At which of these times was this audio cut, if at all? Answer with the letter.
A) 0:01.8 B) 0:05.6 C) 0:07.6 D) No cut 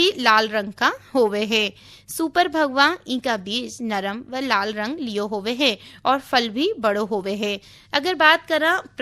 D